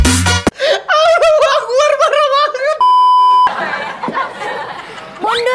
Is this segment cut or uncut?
cut